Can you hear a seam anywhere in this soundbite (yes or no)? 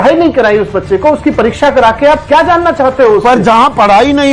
no